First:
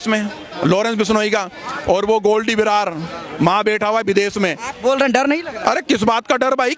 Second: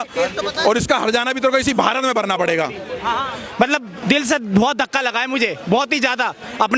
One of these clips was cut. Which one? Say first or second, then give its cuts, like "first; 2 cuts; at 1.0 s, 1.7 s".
second; 1 cut; at 3.4 s